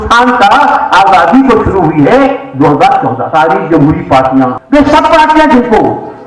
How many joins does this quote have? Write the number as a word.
two